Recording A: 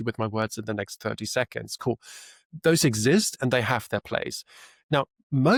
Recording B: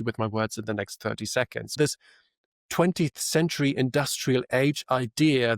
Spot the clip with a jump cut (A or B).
B